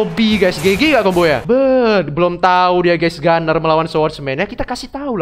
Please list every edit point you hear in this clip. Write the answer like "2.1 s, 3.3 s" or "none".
1.4 s